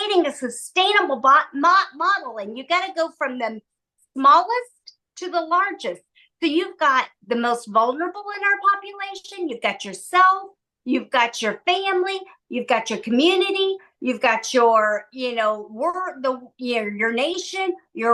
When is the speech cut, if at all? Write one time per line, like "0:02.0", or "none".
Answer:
none